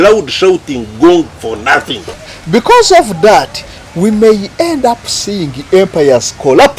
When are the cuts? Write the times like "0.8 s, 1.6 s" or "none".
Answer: 2.0 s